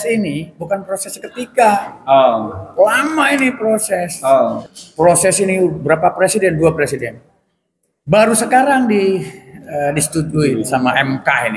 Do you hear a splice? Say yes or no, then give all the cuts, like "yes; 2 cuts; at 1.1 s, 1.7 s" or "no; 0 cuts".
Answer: yes; 2 cuts; at 4.6 s, 10.7 s